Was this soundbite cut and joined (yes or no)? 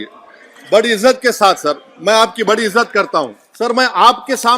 yes